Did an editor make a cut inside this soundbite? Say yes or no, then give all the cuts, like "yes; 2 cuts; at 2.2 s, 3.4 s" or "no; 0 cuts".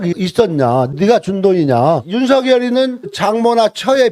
yes; 2 cuts; at 2.1 s, 3.1 s